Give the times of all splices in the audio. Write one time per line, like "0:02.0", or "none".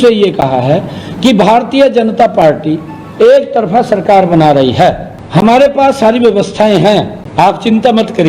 0:05.1
0:07.2